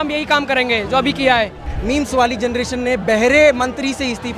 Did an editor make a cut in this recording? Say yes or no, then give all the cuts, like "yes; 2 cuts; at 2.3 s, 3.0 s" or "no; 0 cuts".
yes; 1 cut; at 1.7 s